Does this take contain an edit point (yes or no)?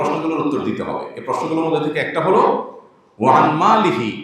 no